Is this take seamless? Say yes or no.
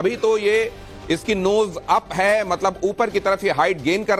yes